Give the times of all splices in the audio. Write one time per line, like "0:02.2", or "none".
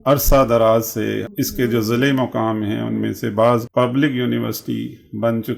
0:01.3
0:03.7